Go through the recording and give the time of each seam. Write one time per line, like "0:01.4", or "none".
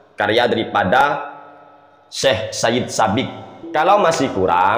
0:03.6